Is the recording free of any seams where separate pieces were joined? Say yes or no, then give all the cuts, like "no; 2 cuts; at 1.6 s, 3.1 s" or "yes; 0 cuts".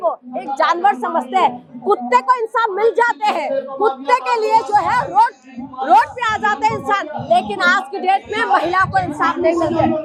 yes; 0 cuts